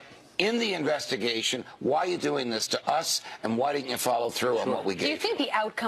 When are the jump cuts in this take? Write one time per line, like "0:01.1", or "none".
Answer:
0:03.5

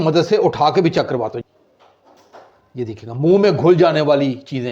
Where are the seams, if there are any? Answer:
0:01.4

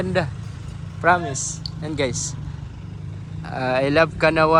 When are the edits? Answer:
none

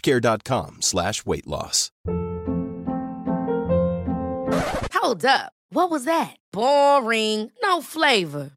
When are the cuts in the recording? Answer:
0:02.0

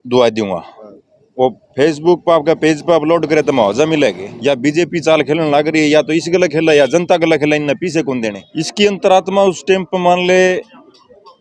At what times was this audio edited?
0:04.3
0:08.4

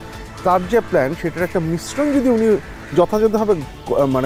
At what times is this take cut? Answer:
none

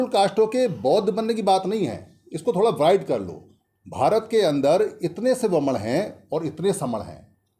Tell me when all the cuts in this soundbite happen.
none

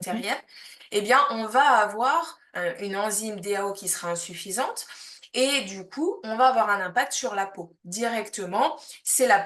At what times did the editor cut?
0:02.5

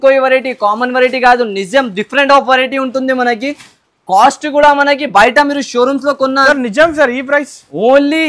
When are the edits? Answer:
0:06.4

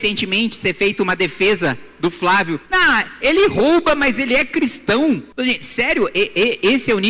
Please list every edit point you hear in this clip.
0:02.6
0:05.3

